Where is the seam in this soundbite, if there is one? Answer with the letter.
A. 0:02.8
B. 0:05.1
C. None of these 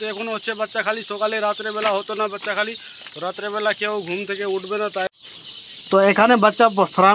B